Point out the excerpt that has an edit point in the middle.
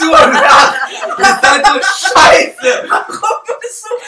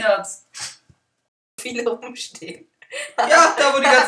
second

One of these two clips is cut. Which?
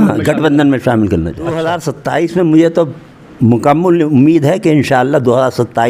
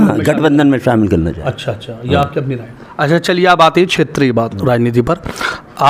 first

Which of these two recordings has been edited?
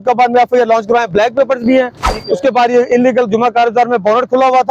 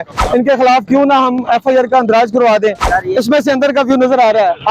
second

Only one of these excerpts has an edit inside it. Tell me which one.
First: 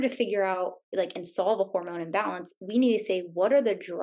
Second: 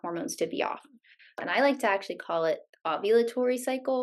second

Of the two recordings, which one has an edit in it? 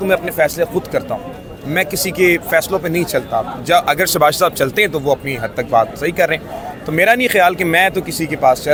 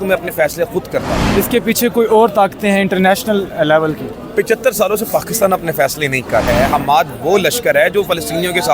second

